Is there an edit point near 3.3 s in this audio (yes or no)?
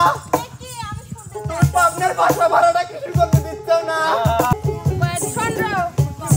no